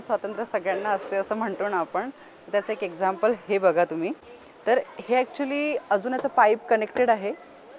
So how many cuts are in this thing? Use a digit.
0